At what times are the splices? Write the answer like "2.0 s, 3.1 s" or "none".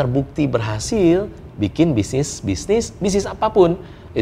none